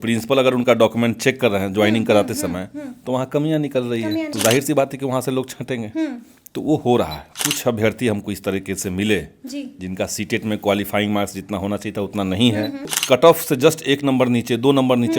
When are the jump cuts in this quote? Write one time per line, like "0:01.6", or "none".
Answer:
0:04.3
0:07.3
0:13.0